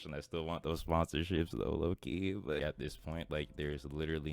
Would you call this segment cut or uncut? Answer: cut